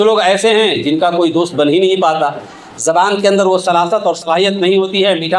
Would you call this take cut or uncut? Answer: uncut